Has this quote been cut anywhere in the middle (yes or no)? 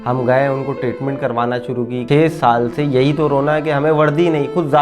yes